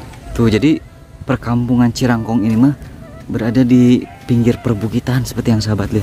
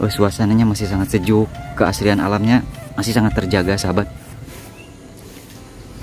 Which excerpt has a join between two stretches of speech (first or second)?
second